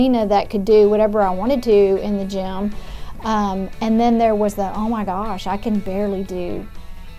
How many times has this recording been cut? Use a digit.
0